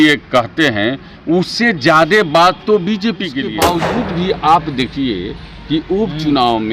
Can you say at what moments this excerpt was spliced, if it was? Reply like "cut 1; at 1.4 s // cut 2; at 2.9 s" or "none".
cut 1; at 3.5 s